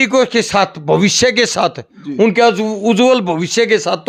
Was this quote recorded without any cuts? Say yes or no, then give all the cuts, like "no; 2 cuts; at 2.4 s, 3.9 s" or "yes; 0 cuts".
yes; 0 cuts